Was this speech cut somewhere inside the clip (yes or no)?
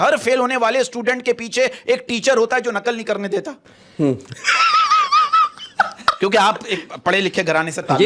no